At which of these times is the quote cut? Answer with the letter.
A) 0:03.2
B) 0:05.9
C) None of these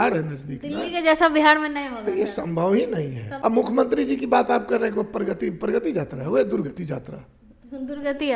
A